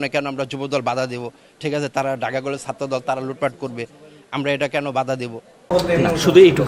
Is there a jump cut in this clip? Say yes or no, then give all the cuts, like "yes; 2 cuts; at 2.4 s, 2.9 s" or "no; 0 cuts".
no; 0 cuts